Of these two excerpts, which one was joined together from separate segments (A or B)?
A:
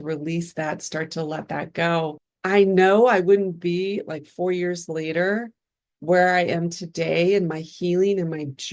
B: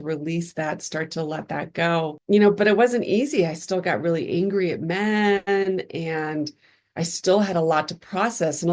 A